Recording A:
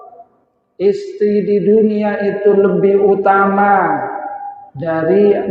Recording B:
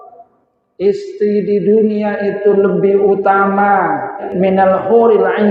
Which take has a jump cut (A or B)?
B